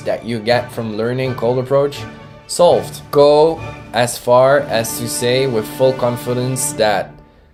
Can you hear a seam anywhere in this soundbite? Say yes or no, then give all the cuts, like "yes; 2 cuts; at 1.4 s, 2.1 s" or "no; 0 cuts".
no; 0 cuts